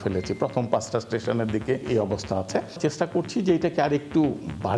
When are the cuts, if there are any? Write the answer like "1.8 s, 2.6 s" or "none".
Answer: 1.9 s, 2.8 s